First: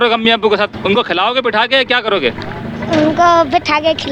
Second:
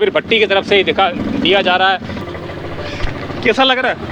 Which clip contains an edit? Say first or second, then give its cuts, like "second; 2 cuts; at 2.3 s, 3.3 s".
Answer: second; 1 cut; at 2.1 s